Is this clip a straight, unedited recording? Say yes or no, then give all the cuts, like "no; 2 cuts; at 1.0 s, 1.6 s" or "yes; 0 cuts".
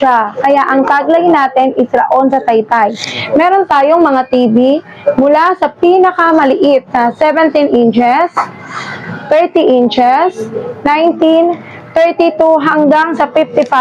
yes; 0 cuts